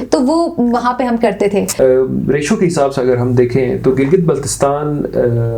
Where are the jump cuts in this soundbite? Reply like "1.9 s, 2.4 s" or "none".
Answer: 1.7 s